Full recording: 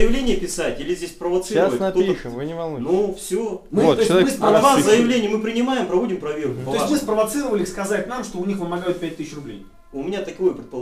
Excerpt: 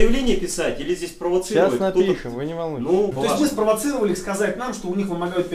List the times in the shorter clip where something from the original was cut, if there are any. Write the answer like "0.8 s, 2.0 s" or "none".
3.1 s